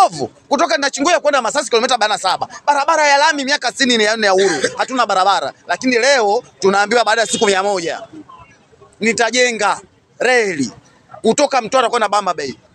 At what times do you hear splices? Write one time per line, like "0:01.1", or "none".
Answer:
none